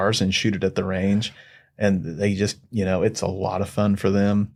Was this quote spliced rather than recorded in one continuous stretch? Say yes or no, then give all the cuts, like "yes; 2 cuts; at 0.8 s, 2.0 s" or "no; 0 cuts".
no; 0 cuts